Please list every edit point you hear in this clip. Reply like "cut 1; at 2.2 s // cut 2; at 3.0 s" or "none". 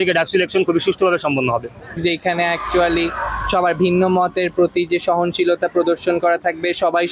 cut 1; at 2.0 s